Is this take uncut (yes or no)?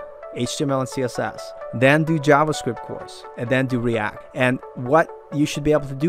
no